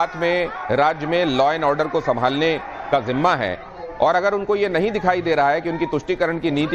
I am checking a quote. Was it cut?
no; 0 cuts

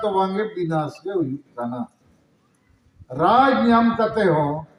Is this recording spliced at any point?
no; 0 cuts

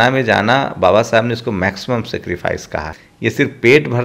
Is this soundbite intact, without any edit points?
no; 1 cut; at 3.0 s

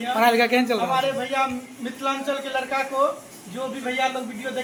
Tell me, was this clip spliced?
no; 0 cuts

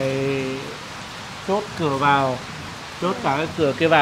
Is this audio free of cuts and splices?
yes; 0 cuts

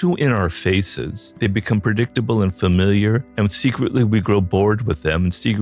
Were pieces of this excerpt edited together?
yes; 2 cuts; at 1.2 s, 3.3 s

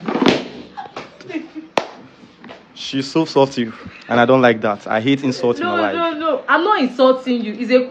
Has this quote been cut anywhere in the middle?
no; 0 cuts

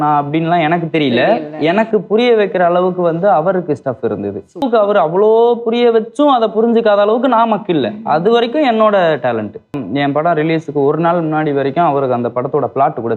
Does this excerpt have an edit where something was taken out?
yes; 2 cuts; at 4.6 s, 9.8 s

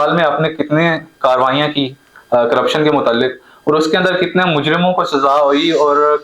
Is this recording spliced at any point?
no; 0 cuts

